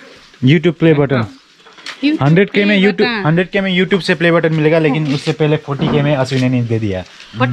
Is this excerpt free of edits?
yes; 0 cuts

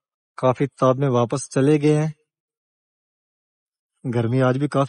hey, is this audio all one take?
yes; 0 cuts

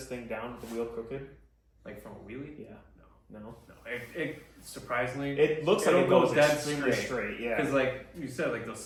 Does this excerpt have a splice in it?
no; 0 cuts

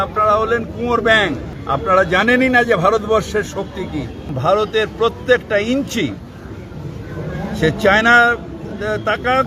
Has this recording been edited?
yes; 2 cuts; at 1.5 s, 4.2 s

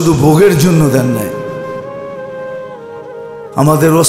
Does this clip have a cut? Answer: yes; 2 cuts; at 1.3 s, 3.1 s

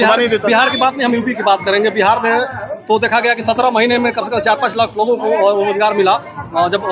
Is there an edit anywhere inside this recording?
no; 0 cuts

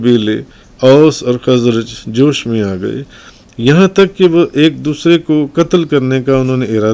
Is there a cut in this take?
no; 0 cuts

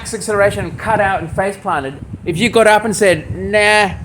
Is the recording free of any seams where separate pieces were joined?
no; 1 cut; at 1.9 s

